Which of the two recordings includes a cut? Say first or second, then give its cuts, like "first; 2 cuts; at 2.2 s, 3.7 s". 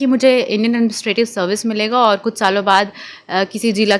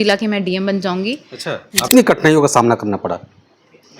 second; 1 cut; at 1.9 s